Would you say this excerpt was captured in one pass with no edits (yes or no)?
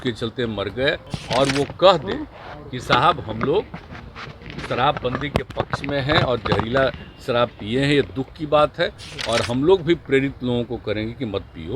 no